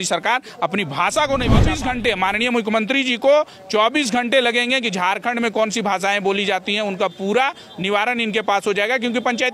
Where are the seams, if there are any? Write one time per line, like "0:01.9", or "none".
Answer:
0:01.7